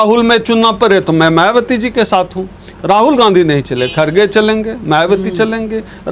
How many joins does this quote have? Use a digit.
0